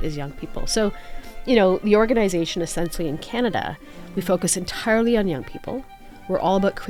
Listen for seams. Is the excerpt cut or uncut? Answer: uncut